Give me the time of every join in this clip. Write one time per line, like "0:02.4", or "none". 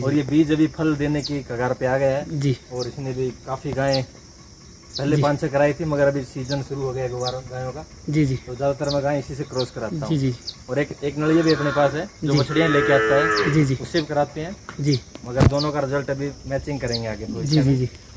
none